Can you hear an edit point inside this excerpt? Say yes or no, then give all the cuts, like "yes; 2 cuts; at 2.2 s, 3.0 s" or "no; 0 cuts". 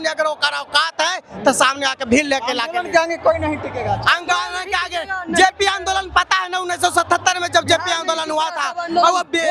no; 0 cuts